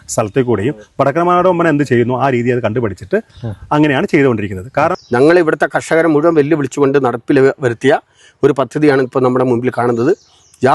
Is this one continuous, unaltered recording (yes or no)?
no